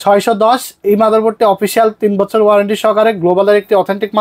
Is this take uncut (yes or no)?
yes